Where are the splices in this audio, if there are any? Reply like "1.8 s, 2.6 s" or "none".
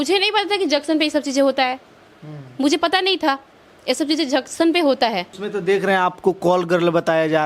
5.4 s